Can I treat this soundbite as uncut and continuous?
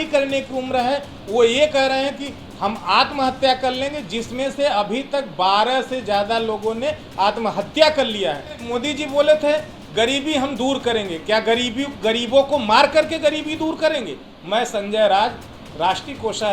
no; 2 cuts; at 8.7 s, 14.3 s

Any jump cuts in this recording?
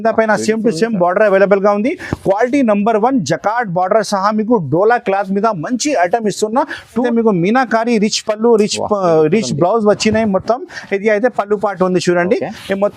yes; 1 cut; at 7.0 s

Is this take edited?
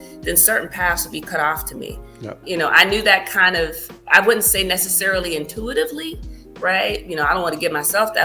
yes; 2 cuts; at 1.2 s, 2.4 s

